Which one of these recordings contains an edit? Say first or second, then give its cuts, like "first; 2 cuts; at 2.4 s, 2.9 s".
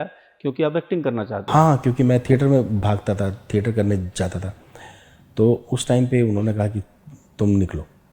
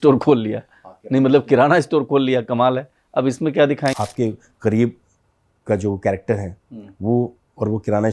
second; 1 cut; at 3.9 s